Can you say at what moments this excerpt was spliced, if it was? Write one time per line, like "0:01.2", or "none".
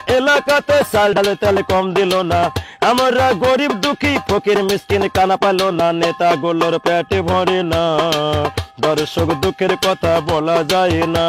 0:01.2